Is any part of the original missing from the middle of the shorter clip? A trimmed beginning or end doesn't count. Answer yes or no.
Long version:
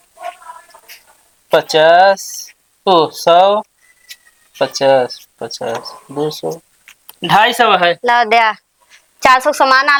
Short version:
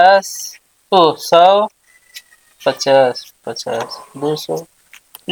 no